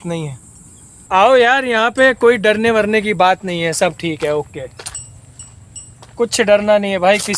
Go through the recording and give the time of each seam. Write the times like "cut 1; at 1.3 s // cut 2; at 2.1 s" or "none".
cut 1; at 1.1 s